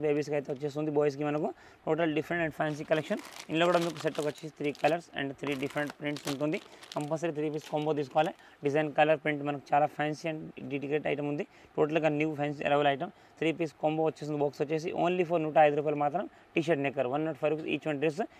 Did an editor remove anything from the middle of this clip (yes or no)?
no